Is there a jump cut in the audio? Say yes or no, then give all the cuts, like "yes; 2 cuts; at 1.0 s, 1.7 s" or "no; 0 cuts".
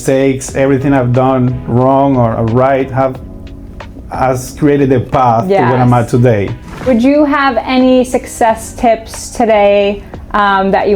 yes; 1 cut; at 6.9 s